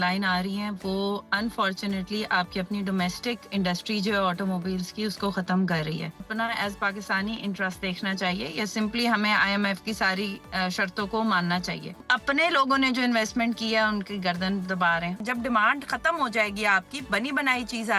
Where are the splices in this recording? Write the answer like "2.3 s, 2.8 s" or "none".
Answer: 6.2 s, 12.1 s, 15.2 s